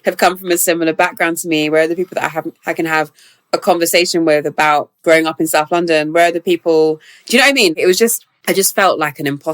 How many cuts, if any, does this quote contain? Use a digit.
2